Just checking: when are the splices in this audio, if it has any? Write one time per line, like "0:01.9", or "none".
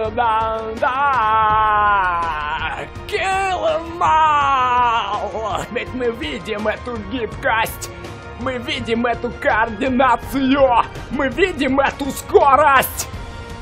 0:05.7